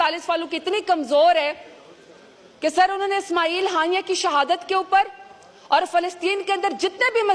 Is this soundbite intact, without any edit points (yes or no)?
yes